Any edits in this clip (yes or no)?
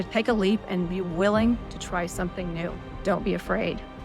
yes